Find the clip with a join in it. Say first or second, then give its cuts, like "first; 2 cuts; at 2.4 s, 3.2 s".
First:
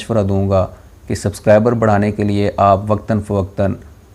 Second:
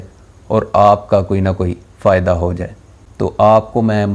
second; 1 cut; at 2.8 s